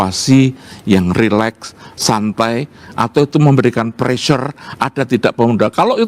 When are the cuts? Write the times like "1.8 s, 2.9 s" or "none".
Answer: none